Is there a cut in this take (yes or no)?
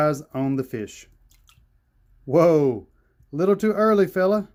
no